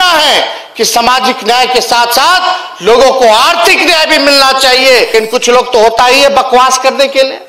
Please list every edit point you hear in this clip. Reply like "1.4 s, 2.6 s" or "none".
5.1 s